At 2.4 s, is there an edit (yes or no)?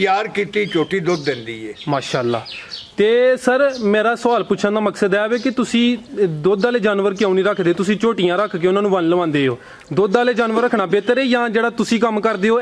no